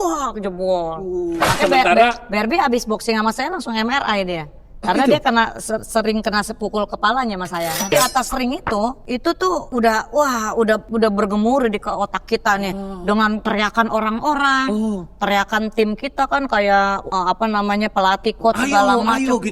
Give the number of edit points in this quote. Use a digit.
6